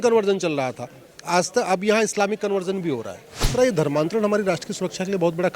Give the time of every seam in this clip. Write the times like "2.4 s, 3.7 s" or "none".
3.5 s